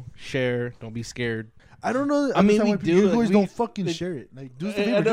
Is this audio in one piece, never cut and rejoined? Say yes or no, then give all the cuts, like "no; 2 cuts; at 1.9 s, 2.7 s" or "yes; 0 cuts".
no; 1 cut; at 1.6 s